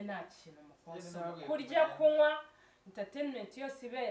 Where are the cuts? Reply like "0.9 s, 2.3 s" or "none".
none